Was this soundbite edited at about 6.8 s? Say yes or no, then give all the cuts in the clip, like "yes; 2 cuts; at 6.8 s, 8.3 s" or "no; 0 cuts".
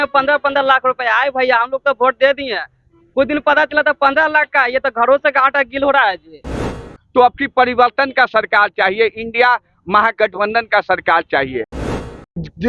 yes; 2 cuts; at 6.8 s, 11.7 s